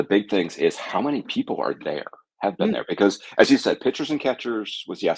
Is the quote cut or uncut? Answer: uncut